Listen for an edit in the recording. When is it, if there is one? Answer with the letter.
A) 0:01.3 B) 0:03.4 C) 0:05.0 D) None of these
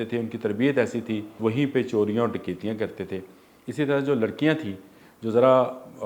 A